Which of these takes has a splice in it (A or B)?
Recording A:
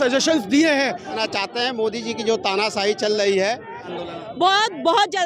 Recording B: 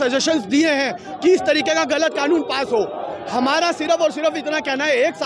A